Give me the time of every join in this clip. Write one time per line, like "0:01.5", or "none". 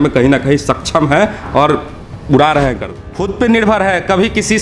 0:03.0